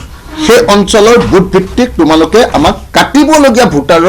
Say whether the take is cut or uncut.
cut